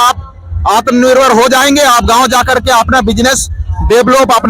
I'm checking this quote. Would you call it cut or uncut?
uncut